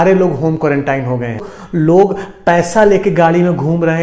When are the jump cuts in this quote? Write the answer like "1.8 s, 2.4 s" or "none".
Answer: 1.6 s